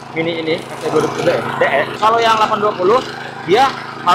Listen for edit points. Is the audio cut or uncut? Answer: cut